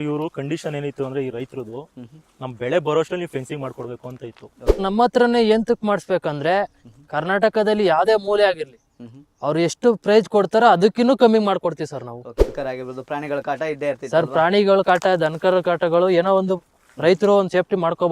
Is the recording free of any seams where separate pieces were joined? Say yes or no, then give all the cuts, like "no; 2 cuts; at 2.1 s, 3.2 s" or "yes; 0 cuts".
no; 2 cuts; at 4.8 s, 12.5 s